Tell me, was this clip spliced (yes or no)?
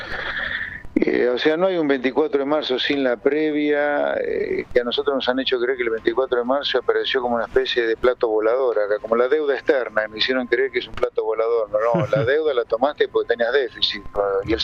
no